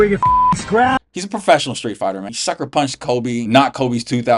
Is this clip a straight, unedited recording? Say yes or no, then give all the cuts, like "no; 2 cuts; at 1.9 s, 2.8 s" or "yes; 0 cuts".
no; 3 cuts; at 1.0 s, 2.3 s, 3.5 s